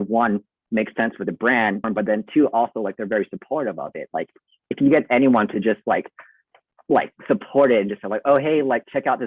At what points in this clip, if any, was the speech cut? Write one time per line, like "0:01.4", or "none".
0:01.8